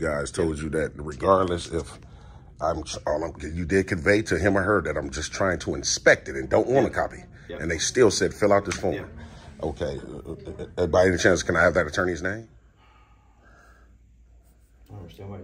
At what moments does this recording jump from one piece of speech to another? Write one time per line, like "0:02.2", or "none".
0:12.3